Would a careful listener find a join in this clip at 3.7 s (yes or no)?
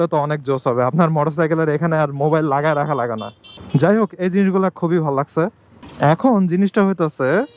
no